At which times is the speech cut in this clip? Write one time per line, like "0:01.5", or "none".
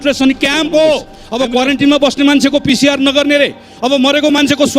0:01.2